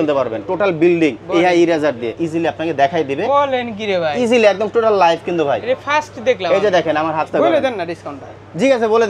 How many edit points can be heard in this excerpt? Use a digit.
2